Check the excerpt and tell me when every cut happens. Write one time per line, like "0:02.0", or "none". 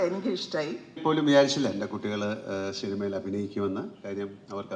0:01.0